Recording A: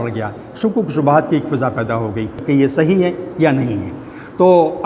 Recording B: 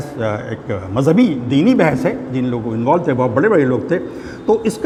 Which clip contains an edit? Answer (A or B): A